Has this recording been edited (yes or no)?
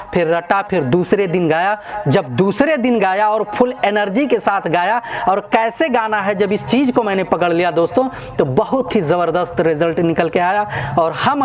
no